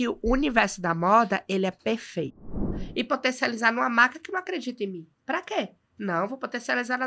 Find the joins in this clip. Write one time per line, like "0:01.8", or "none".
0:02.5